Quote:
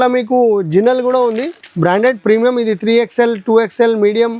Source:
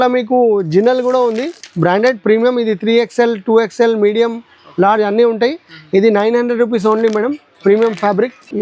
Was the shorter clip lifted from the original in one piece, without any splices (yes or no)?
yes